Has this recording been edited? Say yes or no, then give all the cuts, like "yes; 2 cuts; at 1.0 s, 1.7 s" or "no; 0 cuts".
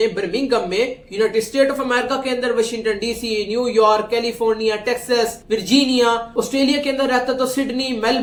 no; 0 cuts